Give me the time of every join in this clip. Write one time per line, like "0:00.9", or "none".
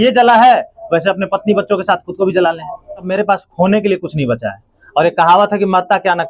0:03.1